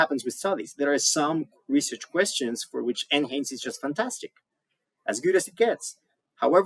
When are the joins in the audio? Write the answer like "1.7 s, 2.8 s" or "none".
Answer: none